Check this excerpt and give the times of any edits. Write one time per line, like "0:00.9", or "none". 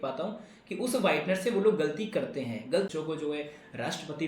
0:02.9